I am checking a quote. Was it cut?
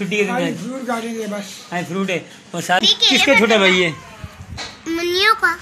yes; 1 cut; at 2.8 s

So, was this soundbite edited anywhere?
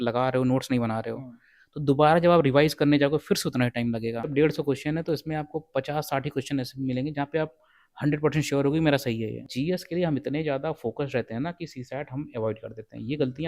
yes; 2 cuts; at 4.3 s, 9.4 s

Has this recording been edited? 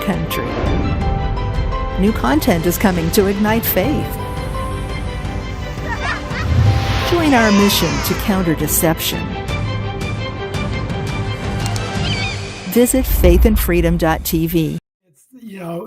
yes; 1 cut; at 14.9 s

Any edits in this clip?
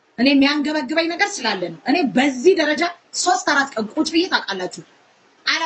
no; 0 cuts

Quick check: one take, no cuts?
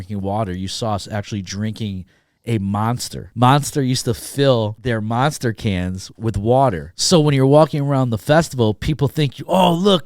no; 3 cuts; at 3.2 s, 4.8 s, 6.9 s

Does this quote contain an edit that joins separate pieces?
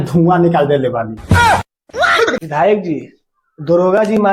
yes; 1 cut; at 2.3 s

